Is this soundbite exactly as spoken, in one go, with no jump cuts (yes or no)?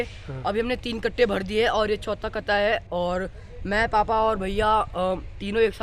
yes